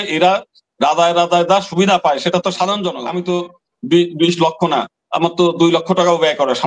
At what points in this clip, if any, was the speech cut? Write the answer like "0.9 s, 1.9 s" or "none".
3.1 s